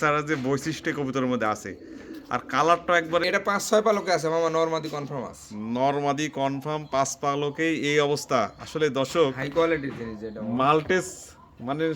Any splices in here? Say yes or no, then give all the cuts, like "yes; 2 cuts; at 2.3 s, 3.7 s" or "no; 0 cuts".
yes; 1 cut; at 3.2 s